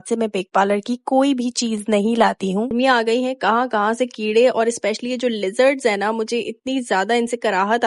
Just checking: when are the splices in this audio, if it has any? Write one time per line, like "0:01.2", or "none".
0:02.7